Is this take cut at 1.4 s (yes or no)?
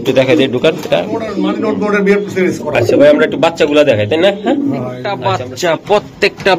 yes